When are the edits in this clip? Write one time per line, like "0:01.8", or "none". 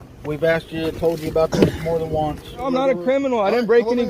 0:02.7